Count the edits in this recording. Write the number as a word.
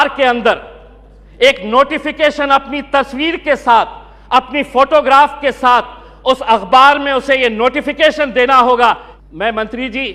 one